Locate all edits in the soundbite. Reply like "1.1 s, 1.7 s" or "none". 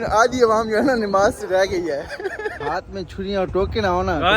2.7 s